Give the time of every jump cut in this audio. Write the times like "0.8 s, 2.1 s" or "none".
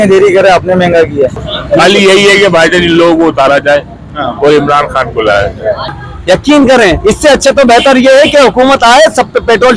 1.4 s, 6.0 s